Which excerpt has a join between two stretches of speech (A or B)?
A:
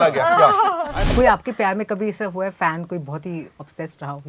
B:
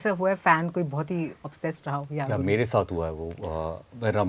A